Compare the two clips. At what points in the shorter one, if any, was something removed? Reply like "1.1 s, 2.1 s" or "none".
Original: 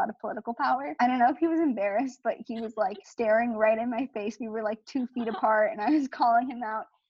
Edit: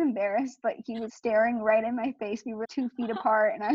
1.1 s, 2.6 s

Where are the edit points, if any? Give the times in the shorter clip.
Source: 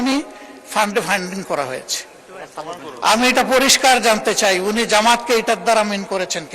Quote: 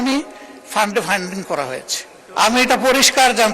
2.2 s

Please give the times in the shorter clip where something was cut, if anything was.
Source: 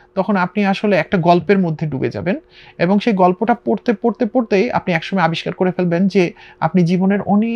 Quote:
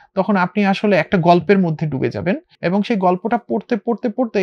2.5 s

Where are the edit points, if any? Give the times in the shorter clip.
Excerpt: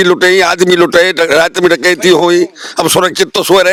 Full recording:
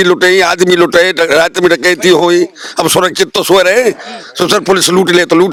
none

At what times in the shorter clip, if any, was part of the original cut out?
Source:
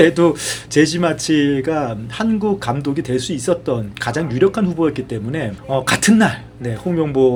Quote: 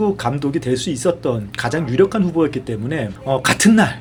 none

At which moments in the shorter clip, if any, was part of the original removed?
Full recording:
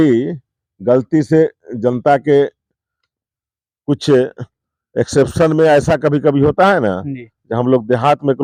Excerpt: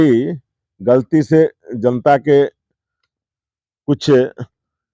none

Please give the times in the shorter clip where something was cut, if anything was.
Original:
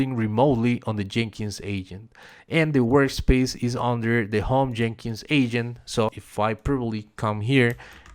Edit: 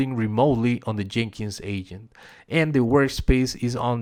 none

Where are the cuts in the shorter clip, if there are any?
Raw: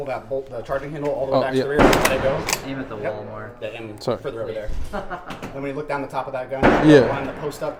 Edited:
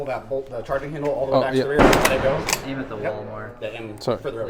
none

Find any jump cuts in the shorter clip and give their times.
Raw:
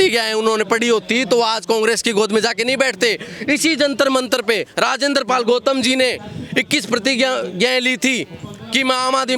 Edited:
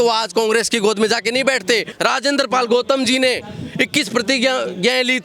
1.9 s

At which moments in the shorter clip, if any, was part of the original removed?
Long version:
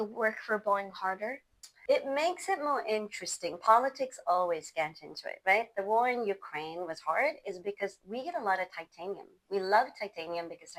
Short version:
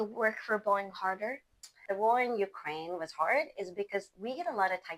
1.8 s

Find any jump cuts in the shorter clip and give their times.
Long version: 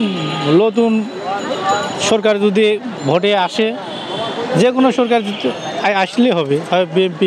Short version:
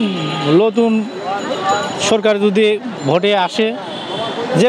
none

